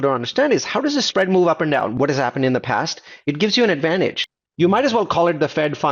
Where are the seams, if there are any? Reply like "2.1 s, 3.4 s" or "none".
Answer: 1.9 s, 4.2 s